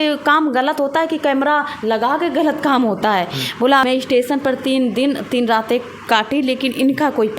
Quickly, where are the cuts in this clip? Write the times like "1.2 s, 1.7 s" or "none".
3.8 s

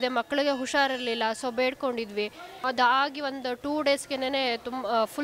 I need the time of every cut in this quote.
2.6 s

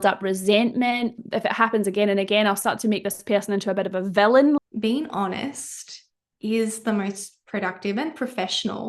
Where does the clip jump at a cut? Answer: 1.2 s, 4.6 s

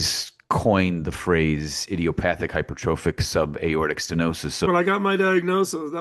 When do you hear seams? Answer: 4.7 s

